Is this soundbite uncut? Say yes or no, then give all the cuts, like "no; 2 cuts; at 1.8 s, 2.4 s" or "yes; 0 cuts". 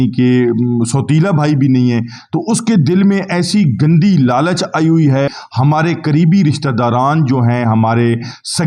no; 1 cut; at 5.4 s